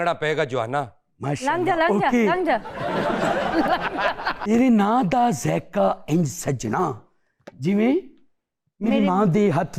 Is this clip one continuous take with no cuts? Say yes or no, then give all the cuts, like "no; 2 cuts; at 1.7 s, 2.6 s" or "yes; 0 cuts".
no; 1 cut; at 4.3 s